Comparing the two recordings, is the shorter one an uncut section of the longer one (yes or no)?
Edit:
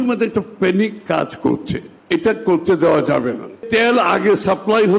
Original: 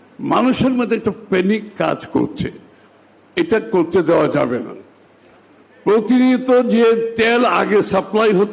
no